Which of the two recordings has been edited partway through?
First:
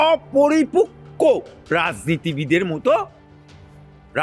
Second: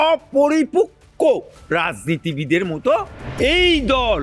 second; 1 cut; at 3.2 s

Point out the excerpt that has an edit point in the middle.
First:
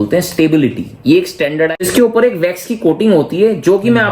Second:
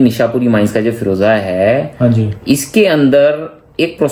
first; 1 cut; at 1.7 s

